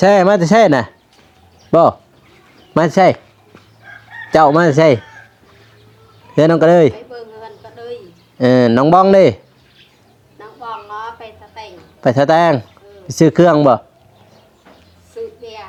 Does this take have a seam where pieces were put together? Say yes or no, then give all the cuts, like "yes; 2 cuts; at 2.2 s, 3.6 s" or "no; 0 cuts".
no; 0 cuts